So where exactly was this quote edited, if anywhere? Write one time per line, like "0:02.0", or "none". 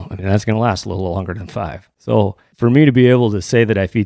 0:02.4

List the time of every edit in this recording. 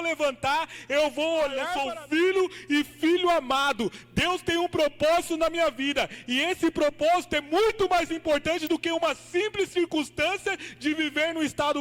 0:01.8

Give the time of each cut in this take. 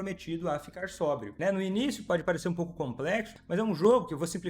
0:01.3
0:03.3

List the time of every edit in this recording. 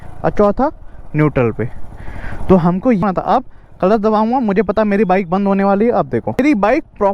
0:03.0
0:06.4

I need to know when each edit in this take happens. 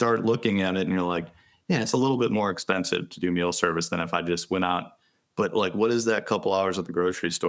none

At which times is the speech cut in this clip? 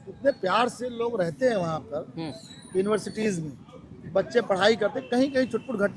none

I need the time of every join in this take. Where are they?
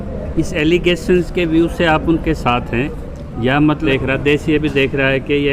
0:03.8

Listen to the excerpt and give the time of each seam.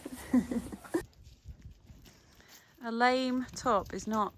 0:01.2

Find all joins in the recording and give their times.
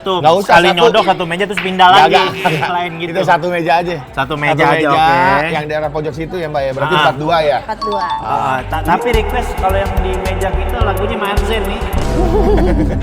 none

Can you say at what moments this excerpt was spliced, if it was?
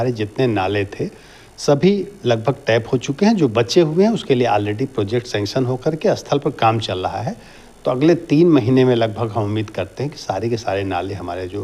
none

